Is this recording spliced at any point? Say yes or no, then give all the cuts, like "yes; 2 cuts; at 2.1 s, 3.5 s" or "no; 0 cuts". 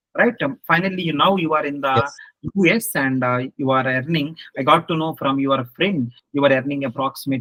no; 0 cuts